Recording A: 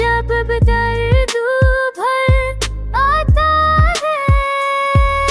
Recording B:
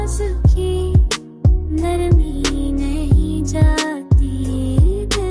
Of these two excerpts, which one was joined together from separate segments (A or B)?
A